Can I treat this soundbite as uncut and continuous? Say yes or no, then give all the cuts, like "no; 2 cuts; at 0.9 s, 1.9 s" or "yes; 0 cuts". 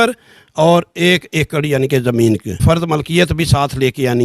no; 1 cut; at 2.6 s